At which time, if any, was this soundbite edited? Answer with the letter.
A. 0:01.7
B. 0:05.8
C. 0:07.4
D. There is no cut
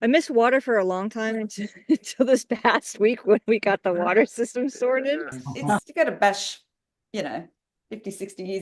B